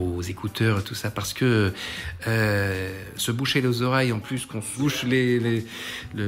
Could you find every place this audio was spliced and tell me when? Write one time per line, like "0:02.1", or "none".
0:04.7